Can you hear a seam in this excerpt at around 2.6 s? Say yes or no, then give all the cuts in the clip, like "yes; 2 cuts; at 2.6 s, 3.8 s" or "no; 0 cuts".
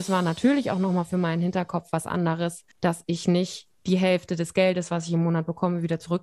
yes; 1 cut; at 2.6 s